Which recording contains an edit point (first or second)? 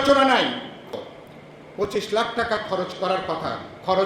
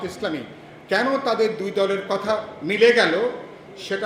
first